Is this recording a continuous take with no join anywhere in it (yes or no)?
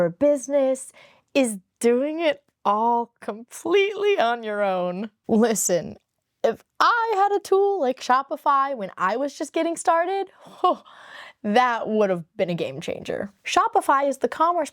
no